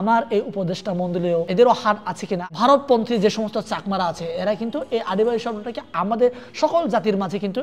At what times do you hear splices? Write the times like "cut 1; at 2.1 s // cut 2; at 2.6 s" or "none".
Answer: cut 1; at 1.5 s // cut 2; at 2.5 s